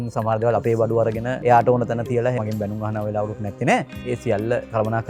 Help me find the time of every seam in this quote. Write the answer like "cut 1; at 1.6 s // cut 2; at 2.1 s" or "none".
cut 1; at 1.3 s // cut 2; at 2.4 s // cut 3; at 4.1 s